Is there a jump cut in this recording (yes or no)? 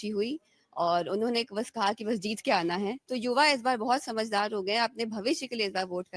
yes